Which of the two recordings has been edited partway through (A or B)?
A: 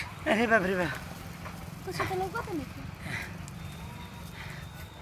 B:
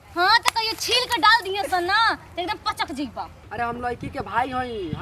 B